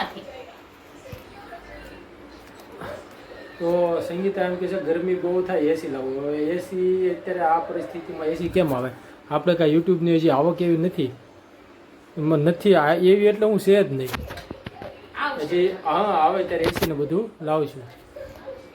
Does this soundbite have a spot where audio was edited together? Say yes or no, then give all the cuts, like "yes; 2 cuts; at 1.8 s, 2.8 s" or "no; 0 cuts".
no; 0 cuts